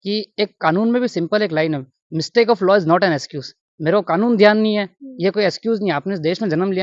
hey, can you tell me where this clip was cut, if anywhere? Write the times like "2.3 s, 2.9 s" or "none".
none